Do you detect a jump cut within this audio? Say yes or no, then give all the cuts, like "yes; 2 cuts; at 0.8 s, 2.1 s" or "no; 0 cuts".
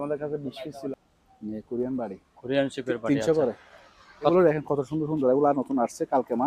yes; 2 cuts; at 0.9 s, 4.3 s